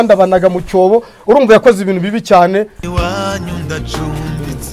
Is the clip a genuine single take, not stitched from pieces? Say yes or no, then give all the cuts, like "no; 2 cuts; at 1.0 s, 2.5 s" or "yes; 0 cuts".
no; 1 cut; at 2.8 s